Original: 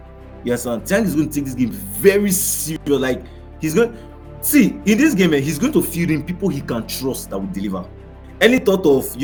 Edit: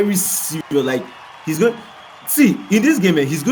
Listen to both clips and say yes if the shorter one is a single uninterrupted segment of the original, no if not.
yes